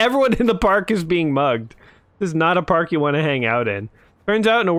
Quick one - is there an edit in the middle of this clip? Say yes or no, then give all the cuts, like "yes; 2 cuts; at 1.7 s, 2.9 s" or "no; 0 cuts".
no; 0 cuts